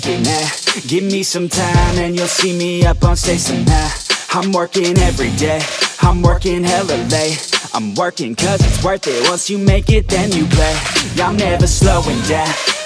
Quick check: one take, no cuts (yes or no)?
yes